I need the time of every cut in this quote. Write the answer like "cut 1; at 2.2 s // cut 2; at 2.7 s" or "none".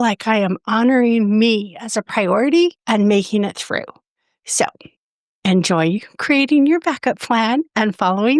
cut 1; at 2.8 s